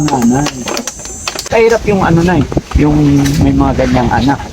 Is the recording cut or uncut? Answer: cut